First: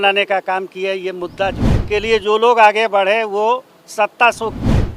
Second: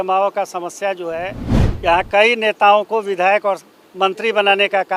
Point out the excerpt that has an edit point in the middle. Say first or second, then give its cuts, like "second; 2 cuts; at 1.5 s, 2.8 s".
first; 1 cut; at 1.7 s